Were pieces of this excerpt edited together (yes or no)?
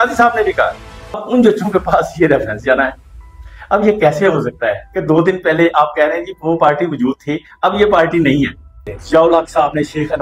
yes